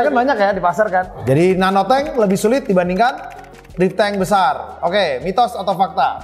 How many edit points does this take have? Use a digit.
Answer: 1